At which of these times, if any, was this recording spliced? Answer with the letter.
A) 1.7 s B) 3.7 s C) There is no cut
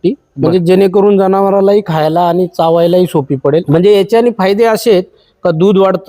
B